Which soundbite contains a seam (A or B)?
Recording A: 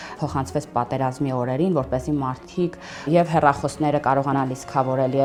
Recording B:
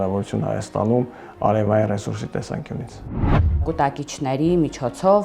B